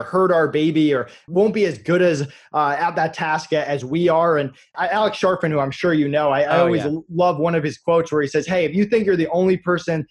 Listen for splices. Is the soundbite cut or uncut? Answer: cut